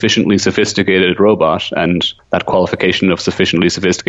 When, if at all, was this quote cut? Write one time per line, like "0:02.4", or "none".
0:02.1